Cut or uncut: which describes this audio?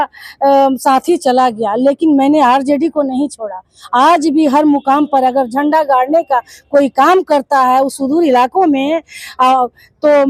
uncut